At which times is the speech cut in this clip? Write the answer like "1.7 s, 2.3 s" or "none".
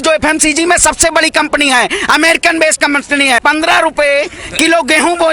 3.4 s